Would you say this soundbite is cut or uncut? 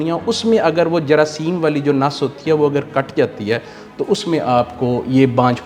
uncut